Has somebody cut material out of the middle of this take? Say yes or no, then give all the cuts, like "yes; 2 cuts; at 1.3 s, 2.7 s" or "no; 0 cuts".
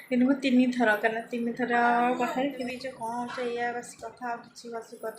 yes; 1 cut; at 2.6 s